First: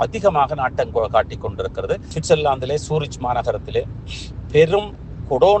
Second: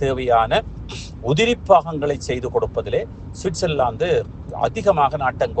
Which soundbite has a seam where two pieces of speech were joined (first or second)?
first